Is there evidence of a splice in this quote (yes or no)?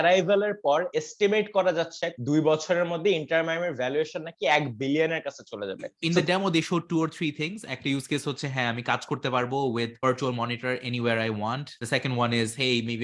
yes